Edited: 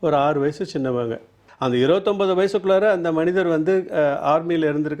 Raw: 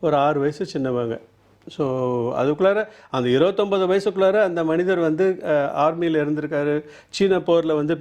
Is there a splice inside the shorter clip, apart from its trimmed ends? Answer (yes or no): yes